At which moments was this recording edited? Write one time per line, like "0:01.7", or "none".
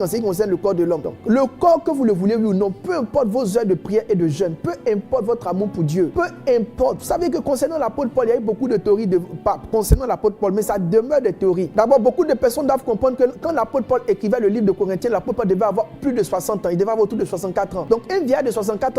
0:01.1
0:06.1
0:11.7
0:17.8